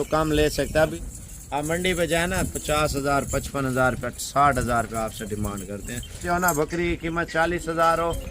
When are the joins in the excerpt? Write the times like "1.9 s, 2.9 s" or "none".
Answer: 0.9 s, 6.2 s